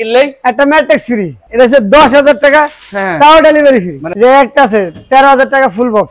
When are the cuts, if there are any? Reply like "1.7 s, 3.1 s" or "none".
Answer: 1.4 s, 4.0 s